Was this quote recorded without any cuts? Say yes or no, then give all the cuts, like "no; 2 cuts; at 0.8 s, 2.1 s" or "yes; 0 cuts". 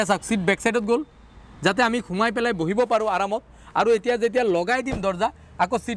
yes; 0 cuts